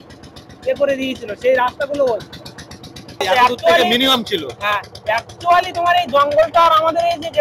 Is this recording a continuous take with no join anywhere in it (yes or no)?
no